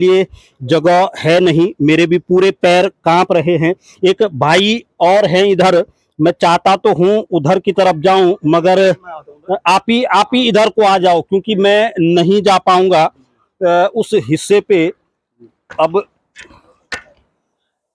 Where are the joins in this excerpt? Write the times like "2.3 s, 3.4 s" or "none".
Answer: none